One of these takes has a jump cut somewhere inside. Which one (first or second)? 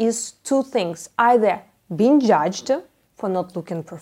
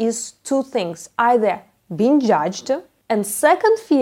second